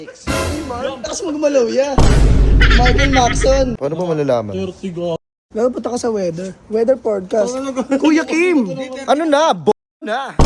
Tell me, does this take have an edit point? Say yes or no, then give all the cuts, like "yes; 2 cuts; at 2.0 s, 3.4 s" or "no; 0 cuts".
yes; 2 cuts; at 1.1 s, 3.8 s